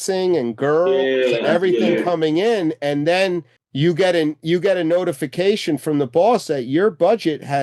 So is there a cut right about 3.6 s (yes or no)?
yes